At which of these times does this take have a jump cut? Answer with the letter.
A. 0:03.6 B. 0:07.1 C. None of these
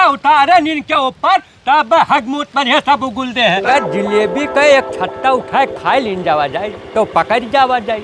A